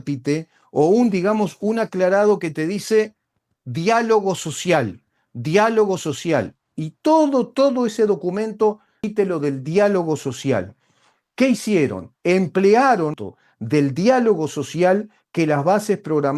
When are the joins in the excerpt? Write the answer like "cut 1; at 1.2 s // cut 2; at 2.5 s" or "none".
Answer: cut 1; at 9.0 s // cut 2; at 13.2 s